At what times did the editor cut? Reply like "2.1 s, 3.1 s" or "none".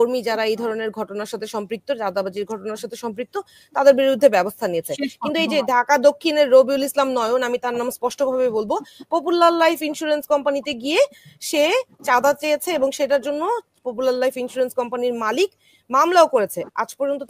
none